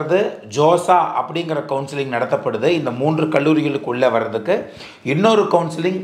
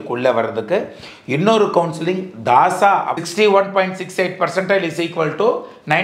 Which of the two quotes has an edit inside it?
second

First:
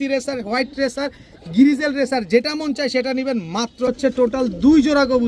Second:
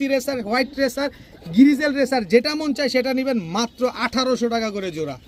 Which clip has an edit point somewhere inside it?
first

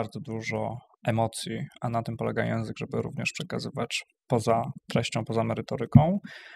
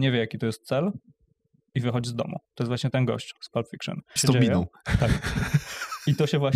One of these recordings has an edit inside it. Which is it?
second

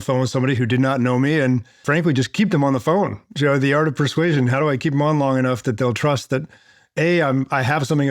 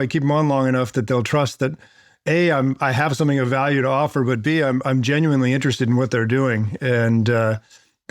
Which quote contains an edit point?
first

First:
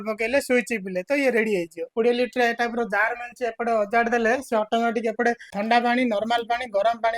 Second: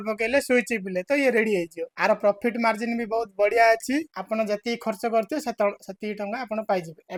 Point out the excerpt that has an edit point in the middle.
first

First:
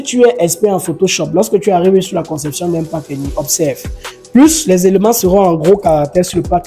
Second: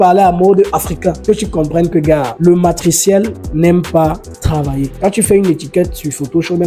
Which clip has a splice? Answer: second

